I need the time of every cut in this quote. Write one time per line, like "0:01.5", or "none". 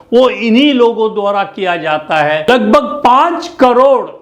0:02.5